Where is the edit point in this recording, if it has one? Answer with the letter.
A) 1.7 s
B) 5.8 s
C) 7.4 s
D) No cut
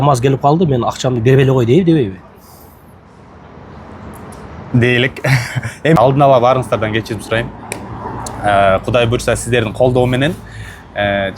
B